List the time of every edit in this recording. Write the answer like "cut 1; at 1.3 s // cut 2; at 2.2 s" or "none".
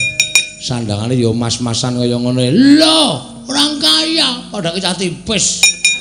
none